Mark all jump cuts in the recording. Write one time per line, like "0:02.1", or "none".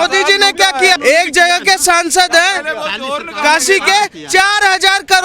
0:01.0